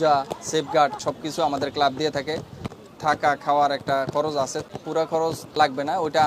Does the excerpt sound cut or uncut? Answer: cut